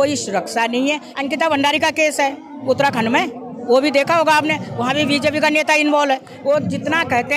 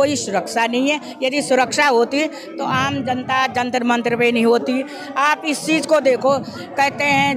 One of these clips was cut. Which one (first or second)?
first